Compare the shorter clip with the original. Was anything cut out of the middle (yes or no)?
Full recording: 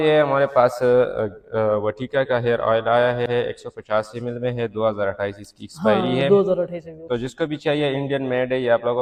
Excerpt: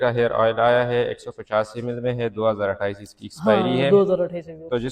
yes